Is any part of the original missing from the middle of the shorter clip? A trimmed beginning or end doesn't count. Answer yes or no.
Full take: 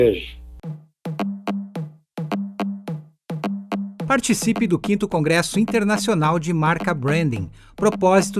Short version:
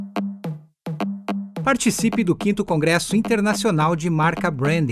yes